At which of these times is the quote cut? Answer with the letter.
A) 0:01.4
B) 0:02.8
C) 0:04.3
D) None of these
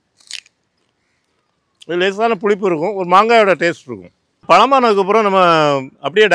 C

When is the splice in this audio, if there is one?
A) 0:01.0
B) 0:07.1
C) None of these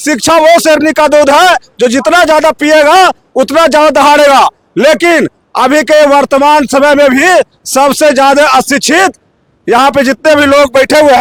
C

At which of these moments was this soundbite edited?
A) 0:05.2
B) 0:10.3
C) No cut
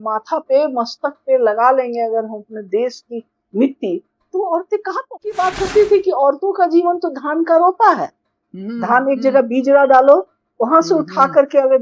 A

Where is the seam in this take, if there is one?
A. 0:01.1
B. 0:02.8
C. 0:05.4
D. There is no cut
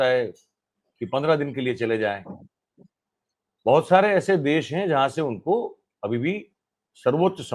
D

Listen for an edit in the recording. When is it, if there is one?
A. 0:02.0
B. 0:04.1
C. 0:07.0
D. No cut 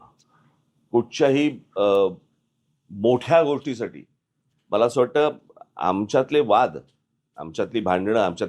A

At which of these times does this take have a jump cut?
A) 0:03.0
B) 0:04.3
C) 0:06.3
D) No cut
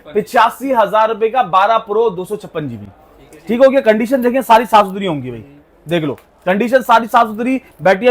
D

